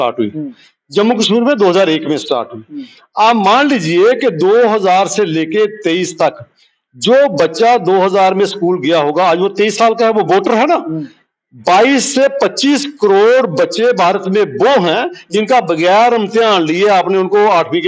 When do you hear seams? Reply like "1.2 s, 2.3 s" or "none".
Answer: none